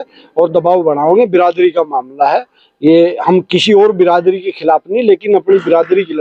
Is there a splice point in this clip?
no; 0 cuts

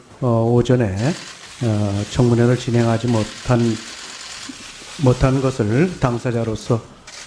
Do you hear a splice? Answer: yes; 1 cut; at 1.5 s

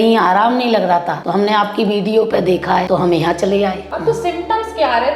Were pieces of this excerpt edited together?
yes; 3 cuts; at 1.2 s, 2.9 s, 3.9 s

